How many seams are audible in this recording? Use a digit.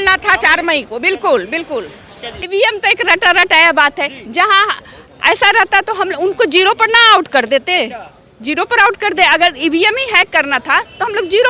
1